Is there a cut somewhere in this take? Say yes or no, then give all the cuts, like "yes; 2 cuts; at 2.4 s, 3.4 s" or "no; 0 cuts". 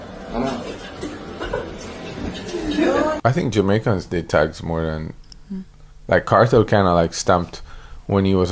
yes; 1 cut; at 3.2 s